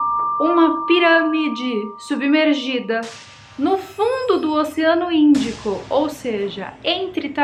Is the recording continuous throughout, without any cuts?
yes; 0 cuts

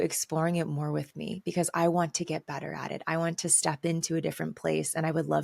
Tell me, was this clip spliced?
no; 0 cuts

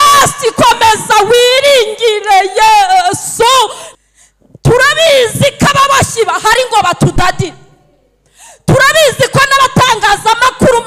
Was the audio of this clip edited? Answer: yes; 1 cut; at 3.8 s

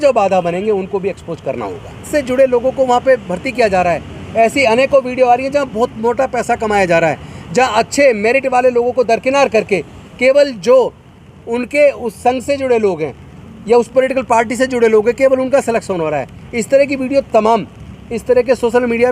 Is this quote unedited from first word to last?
no; 1 cut; at 2.1 s

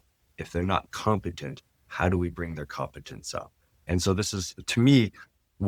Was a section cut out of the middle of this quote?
no; 0 cuts

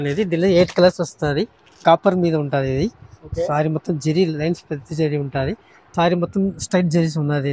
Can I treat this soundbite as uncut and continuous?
no; 2 cuts; at 1.6 s, 5.9 s

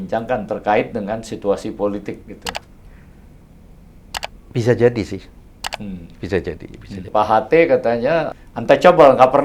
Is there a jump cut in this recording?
yes; 3 cuts; at 2.8 s, 7.0 s, 8.4 s

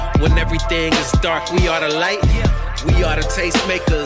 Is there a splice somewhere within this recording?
no; 0 cuts

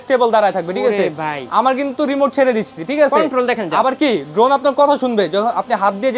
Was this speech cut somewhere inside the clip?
no; 0 cuts

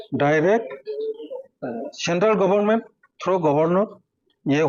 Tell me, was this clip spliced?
no; 0 cuts

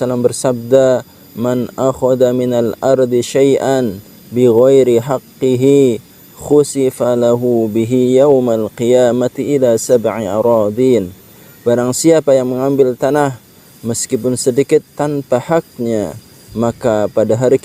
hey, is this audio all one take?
yes; 0 cuts

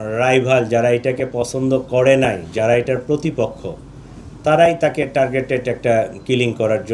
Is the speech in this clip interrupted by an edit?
no; 0 cuts

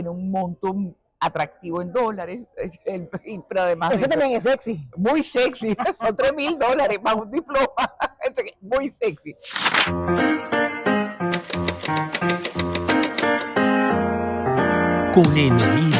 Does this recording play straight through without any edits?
no; 1 cut; at 9.8 s

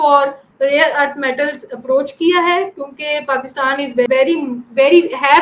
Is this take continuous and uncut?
no; 1 cut; at 4.1 s

